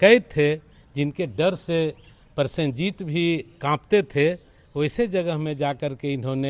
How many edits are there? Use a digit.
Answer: 0